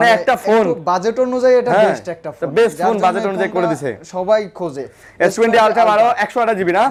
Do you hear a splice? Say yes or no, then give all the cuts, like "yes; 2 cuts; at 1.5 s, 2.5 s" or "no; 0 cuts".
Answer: no; 0 cuts